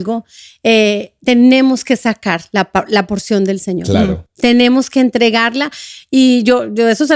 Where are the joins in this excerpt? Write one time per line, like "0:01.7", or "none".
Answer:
none